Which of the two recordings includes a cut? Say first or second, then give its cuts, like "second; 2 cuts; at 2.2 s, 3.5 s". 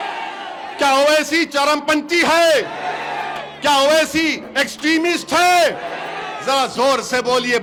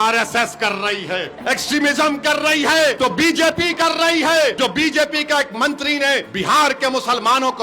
second; 4 cuts; at 1.3 s, 3.0 s, 4.6 s, 6.3 s